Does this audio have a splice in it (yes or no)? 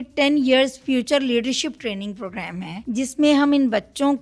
yes